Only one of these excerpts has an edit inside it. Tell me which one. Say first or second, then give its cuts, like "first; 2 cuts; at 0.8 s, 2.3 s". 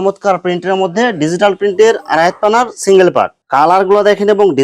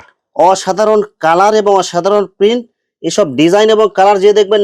first; 1 cut; at 3.4 s